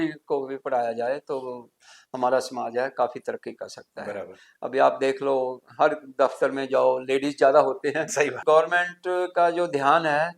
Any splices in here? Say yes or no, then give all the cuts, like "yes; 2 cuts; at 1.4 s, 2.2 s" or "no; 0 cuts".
yes; 1 cut; at 8.4 s